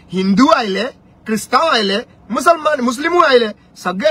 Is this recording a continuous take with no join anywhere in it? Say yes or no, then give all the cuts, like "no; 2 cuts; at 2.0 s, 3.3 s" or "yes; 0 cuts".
yes; 0 cuts